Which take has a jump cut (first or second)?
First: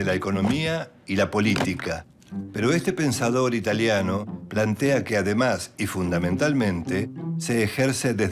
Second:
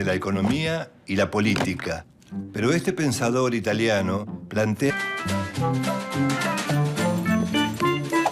first